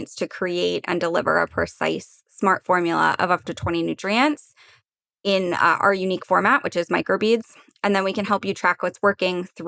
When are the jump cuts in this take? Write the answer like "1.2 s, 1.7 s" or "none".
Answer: none